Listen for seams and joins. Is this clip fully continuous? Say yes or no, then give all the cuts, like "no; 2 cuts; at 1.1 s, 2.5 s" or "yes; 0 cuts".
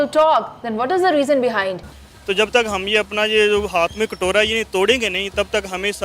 no; 1 cut; at 1.8 s